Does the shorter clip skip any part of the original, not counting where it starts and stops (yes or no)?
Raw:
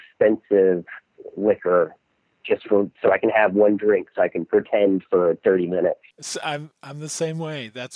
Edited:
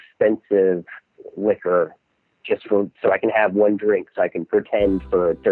no